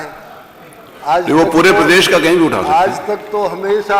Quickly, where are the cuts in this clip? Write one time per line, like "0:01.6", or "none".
none